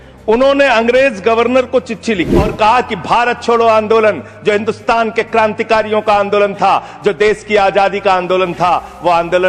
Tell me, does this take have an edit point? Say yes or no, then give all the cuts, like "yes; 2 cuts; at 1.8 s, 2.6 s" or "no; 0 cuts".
yes; 1 cut; at 2.5 s